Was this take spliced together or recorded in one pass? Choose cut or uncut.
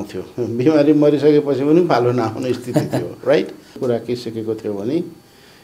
cut